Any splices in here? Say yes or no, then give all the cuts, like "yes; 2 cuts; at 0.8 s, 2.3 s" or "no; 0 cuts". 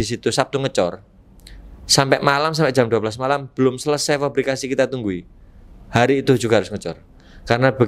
no; 0 cuts